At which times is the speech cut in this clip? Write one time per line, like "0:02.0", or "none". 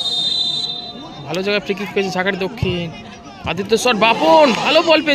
none